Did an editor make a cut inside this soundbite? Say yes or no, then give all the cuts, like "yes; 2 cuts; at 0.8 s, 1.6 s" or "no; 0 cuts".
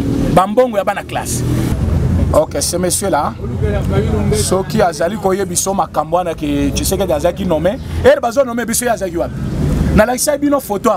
yes; 1 cut; at 1.7 s